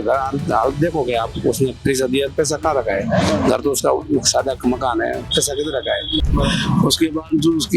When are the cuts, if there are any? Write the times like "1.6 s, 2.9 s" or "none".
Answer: 6.2 s